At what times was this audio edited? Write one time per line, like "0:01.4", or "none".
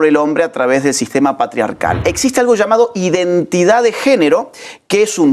0:02.0